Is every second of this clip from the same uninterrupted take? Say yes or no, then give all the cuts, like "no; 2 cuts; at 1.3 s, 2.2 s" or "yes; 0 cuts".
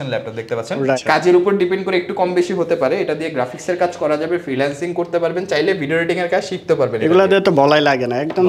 no; 1 cut; at 1.0 s